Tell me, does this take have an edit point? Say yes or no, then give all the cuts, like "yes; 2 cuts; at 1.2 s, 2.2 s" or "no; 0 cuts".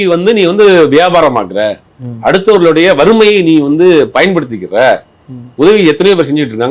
no; 0 cuts